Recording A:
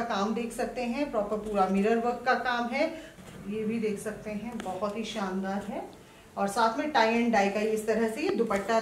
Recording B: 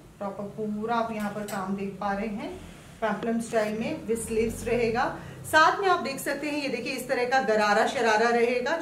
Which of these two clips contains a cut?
A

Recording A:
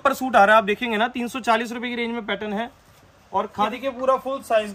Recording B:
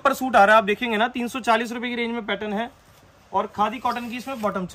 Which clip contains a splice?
A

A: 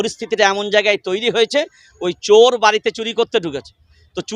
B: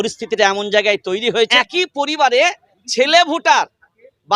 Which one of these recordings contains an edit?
B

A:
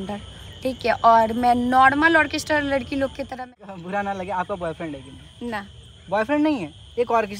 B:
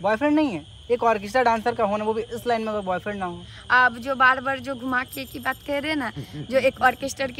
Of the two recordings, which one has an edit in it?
A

